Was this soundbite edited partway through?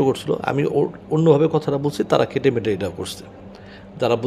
no; 0 cuts

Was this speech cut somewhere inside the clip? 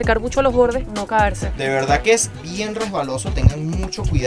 yes; 1 cut; at 1.5 s

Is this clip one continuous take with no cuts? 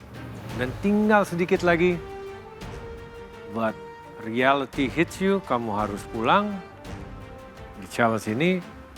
yes; 0 cuts

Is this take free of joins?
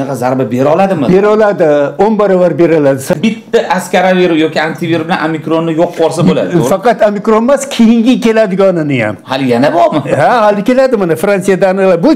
no; 1 cut; at 3.1 s

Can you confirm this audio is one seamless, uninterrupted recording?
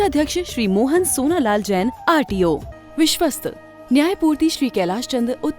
no; 1 cut; at 2.7 s

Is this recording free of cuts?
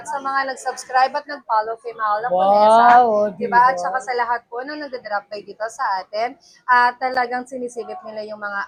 yes; 0 cuts

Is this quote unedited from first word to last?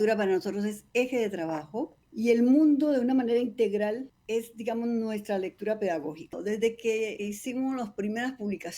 no; 4 cuts; at 2.0 s, 4.1 s, 6.4 s, 7.2 s

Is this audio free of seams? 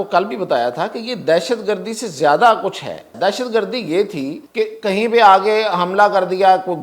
no; 2 cuts; at 3.1 s, 4.4 s

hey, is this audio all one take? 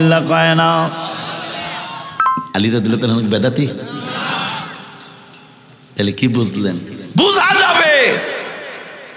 no; 1 cut; at 2.1 s

